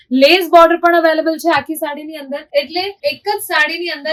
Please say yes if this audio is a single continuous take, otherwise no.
yes